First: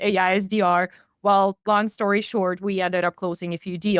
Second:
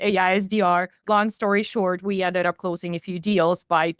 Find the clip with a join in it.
second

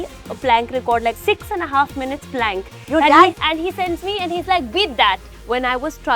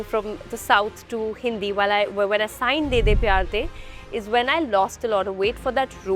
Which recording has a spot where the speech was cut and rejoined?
first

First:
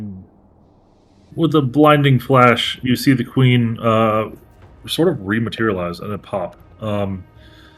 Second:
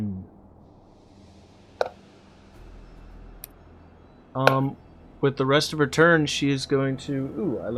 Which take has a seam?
first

